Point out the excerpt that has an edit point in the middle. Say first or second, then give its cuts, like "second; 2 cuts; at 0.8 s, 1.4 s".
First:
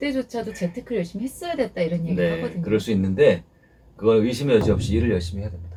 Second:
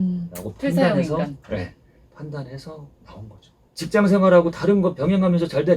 second; 1 cut; at 3.6 s